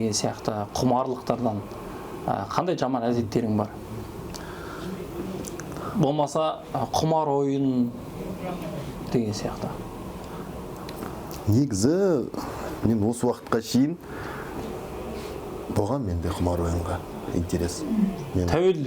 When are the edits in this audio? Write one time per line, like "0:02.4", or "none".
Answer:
none